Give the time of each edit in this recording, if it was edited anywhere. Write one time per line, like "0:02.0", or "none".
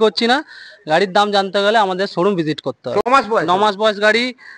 0:03.0